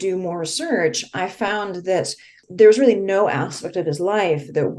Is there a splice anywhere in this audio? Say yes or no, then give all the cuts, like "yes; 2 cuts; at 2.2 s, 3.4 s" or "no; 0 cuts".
yes; 1 cut; at 2.4 s